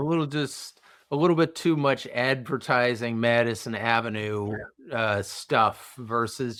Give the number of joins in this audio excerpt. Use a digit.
0